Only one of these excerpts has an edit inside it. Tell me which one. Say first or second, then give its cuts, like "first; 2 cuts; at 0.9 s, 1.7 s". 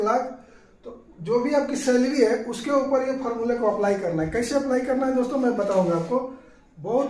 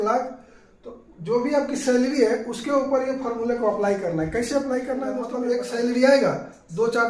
second; 1 cut; at 5.3 s